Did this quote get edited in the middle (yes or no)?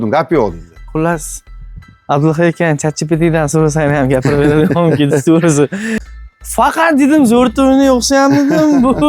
yes